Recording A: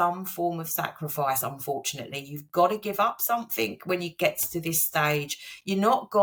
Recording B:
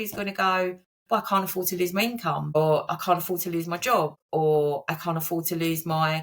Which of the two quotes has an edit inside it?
B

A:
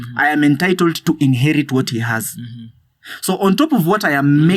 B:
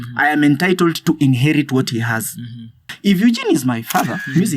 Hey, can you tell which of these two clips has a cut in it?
B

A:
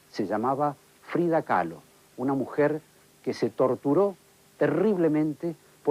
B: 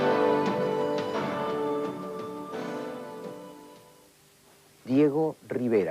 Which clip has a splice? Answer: B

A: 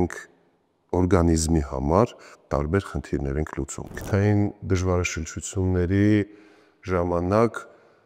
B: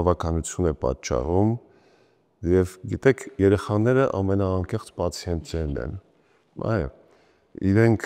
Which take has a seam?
A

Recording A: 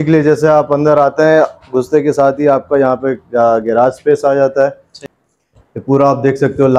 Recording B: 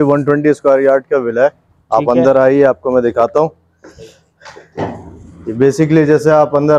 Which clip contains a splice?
A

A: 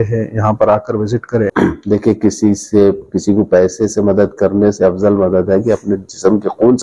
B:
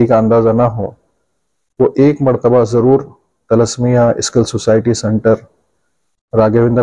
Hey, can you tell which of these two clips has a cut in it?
A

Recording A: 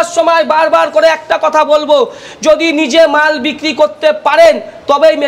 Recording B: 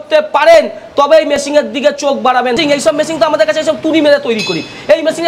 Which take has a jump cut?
B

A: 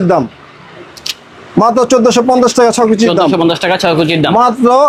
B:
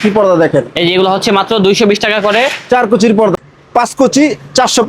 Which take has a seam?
B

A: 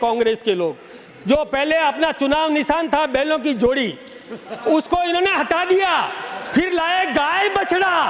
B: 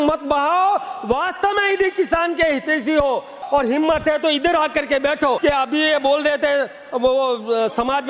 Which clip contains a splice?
B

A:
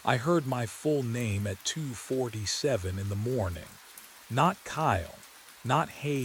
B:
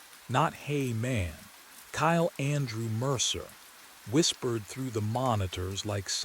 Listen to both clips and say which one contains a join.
B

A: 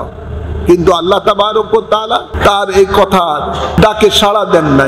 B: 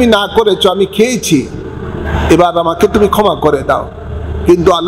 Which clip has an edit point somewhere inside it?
A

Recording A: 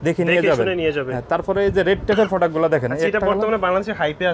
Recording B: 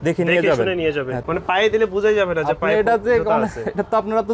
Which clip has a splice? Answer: B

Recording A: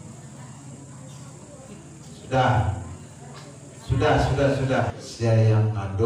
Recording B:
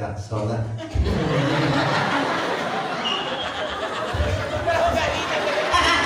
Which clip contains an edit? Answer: A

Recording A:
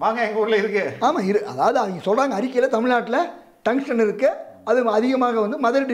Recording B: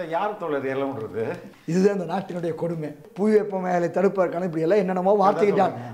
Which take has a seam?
B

